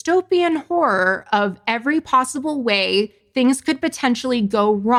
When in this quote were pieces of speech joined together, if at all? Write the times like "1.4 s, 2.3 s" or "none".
none